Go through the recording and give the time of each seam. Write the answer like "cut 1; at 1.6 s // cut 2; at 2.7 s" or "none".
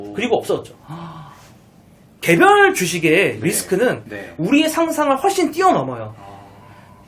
cut 1; at 2.0 s